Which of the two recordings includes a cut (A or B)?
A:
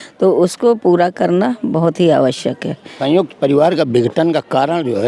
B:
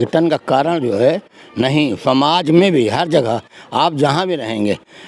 A